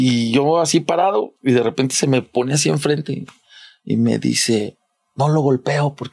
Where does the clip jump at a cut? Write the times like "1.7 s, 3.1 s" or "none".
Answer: none